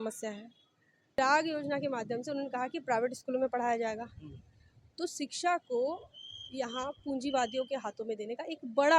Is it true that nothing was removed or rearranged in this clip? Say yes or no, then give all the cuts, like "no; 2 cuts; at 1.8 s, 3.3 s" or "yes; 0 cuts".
no; 1 cut; at 1.2 s